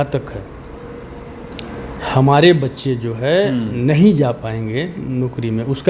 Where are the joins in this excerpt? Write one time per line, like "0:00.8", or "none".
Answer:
none